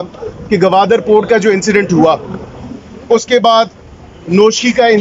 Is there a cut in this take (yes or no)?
no